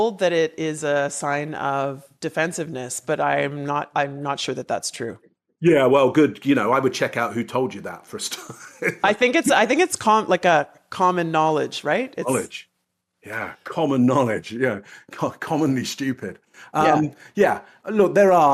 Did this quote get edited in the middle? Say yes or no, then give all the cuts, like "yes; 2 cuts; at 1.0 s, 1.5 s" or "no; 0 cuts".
no; 0 cuts